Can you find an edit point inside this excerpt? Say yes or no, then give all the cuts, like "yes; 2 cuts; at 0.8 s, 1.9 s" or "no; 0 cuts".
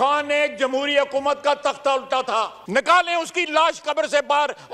no; 0 cuts